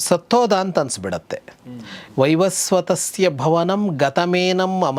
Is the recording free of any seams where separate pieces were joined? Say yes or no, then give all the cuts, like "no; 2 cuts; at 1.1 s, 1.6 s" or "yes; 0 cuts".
yes; 0 cuts